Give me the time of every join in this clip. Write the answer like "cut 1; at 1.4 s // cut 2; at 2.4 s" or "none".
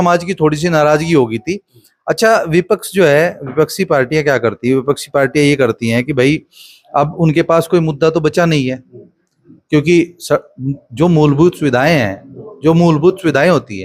none